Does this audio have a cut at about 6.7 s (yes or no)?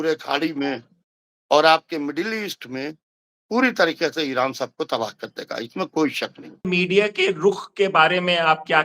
yes